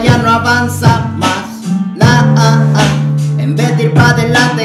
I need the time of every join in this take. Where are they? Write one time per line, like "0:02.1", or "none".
none